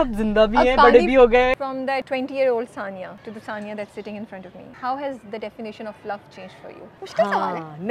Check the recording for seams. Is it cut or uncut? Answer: cut